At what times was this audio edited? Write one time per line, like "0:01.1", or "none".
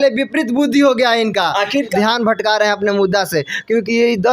0:01.9